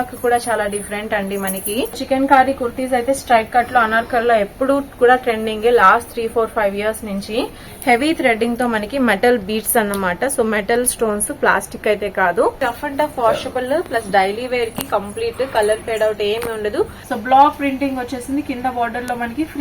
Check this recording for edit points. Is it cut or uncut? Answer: cut